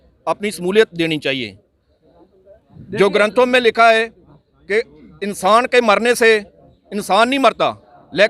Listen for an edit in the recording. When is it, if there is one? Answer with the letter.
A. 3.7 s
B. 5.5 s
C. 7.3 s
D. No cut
D